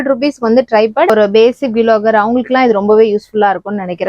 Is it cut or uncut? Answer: cut